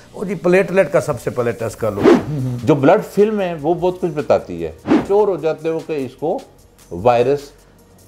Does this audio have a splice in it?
yes; 2 cuts; at 2.1 s, 5.0 s

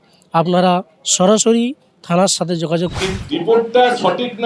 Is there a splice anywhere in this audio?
yes; 1 cut; at 2.9 s

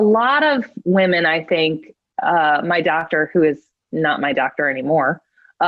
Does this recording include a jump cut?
yes; 1 cut; at 2.0 s

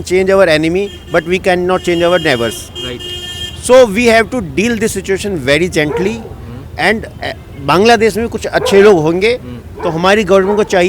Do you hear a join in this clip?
no; 0 cuts

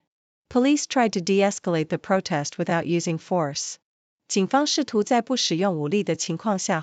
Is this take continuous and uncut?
yes; 0 cuts

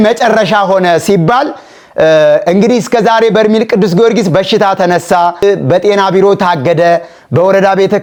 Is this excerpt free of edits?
yes; 0 cuts

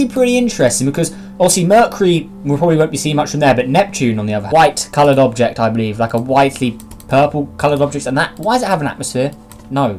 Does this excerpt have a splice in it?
no; 0 cuts

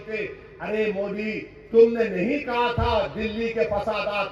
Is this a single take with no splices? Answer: yes; 0 cuts

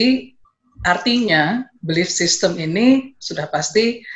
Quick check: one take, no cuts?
yes; 0 cuts

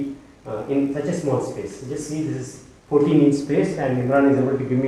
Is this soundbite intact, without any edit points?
yes; 0 cuts

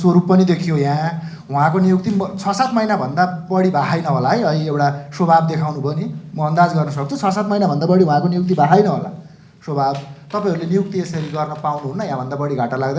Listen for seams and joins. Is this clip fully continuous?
yes; 0 cuts

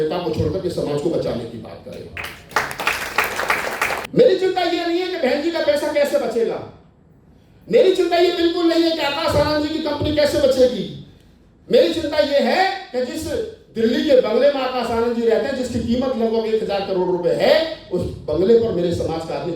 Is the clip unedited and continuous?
no; 1 cut; at 4.0 s

